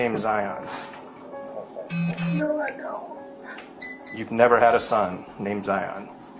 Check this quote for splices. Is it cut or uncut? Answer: uncut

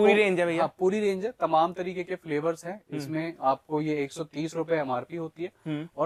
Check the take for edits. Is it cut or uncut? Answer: uncut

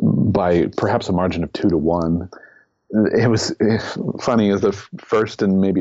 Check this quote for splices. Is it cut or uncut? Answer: cut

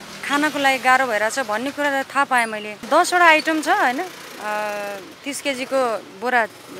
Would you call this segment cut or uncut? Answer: cut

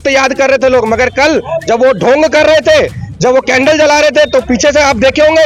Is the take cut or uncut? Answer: uncut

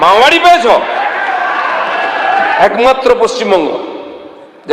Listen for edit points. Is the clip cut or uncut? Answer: cut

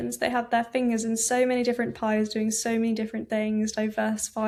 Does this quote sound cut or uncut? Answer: uncut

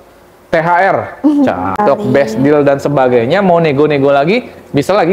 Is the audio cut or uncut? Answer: cut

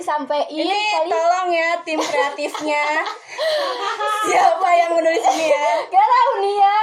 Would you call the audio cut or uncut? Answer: uncut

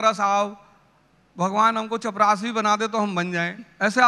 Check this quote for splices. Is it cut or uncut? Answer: uncut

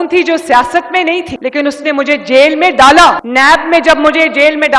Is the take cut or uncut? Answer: uncut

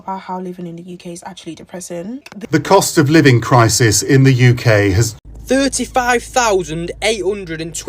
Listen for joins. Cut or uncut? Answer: cut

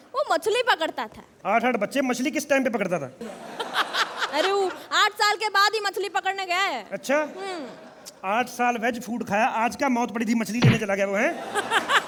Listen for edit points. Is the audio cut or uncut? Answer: uncut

